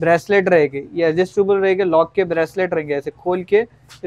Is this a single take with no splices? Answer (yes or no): yes